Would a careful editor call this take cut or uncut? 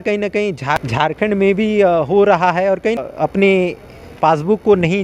cut